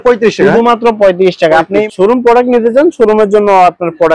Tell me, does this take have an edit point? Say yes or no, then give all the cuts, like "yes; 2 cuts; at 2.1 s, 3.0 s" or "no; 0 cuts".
yes; 1 cut; at 1.9 s